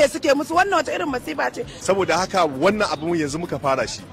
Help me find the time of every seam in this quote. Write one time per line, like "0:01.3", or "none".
0:01.7